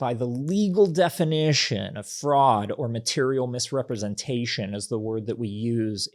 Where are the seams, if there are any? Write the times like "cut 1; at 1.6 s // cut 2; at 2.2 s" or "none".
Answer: none